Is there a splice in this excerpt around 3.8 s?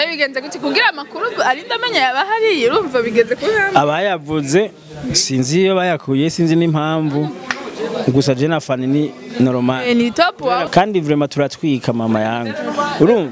no; 1 cut; at 10.6 s

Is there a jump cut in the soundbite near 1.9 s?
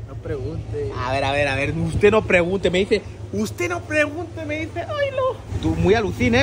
no; 0 cuts

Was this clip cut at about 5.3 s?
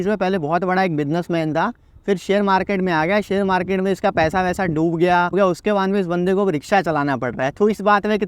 yes; 1 cut; at 5.3 s

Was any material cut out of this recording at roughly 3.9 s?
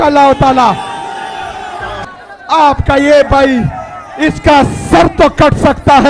no; 1 cut; at 2.0 s

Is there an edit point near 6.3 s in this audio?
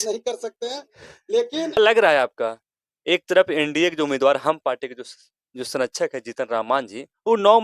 no; 1 cut; at 1.8 s

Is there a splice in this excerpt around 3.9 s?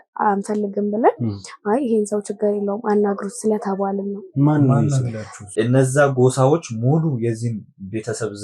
no; 1 cut; at 5.5 s

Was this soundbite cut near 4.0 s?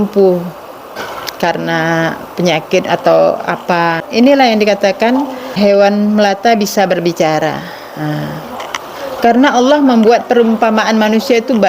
yes; 4 cuts; at 0.9 s, 4.0 s, 5.5 s, 8.6 s

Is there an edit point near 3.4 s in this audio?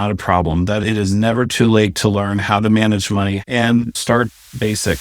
yes; 1 cut; at 3.4 s

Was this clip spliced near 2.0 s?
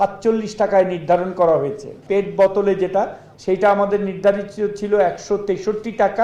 yes; 2 cuts; at 2.0 s, 3.3 s

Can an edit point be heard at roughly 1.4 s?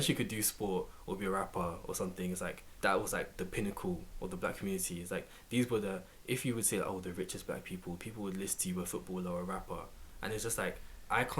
no; 1 cut; at 2.6 s

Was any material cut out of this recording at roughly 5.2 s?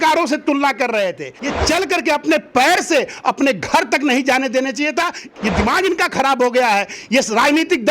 yes; 2 cuts; at 1.4 s, 5.2 s

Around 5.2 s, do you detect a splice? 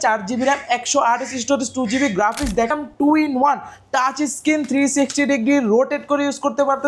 no; 1 cut; at 2.7 s

